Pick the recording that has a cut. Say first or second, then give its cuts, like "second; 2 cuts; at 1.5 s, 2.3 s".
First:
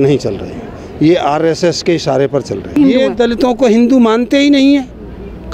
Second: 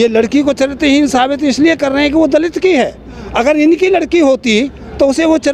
first; 1 cut; at 2.7 s